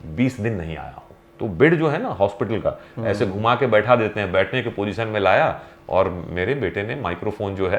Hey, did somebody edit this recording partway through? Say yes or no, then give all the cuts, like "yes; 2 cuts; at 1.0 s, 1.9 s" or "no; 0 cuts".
yes; 1 cut; at 1.2 s